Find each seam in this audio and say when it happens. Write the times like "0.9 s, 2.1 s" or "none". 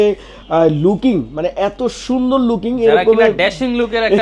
none